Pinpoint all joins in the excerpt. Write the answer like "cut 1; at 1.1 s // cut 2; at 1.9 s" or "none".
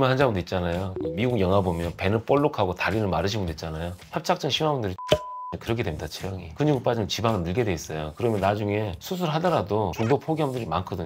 cut 1; at 6.5 s // cut 2; at 9.9 s